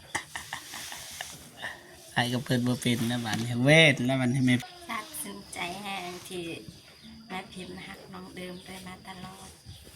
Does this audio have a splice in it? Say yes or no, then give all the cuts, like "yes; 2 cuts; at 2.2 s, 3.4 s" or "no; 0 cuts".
yes; 1 cut; at 4.6 s